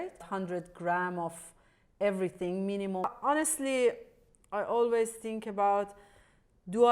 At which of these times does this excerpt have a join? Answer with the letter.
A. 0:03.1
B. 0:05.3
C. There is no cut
A